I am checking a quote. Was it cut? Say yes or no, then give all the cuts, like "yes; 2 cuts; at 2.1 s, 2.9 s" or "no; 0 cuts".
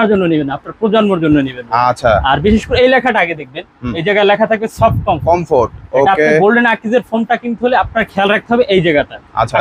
no; 0 cuts